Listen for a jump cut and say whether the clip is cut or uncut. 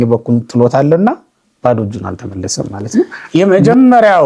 cut